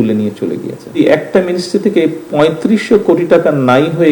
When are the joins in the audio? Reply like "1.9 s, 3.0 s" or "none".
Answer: 1.0 s